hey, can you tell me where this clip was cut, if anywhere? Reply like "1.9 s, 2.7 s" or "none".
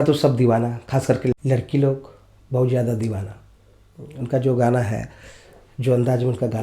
1.3 s